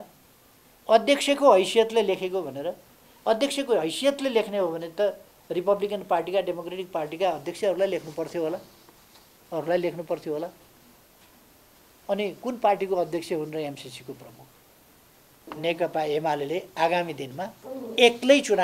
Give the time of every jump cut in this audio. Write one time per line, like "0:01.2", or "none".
0:15.5